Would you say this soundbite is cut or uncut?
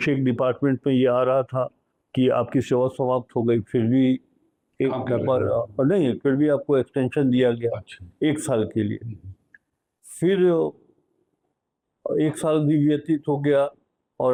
uncut